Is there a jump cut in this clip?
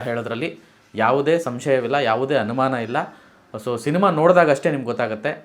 no; 0 cuts

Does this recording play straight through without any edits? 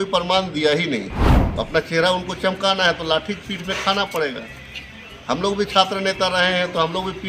no; 1 cut; at 1.2 s

